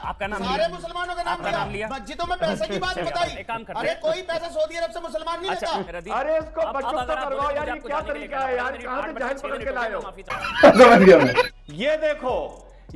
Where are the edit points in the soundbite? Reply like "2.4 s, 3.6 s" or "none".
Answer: 5.9 s, 11.5 s